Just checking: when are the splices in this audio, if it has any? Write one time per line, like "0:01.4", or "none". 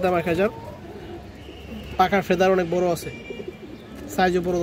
none